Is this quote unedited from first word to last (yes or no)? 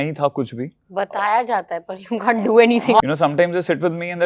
no